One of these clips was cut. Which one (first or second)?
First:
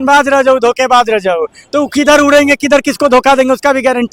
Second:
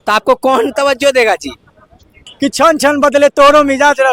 second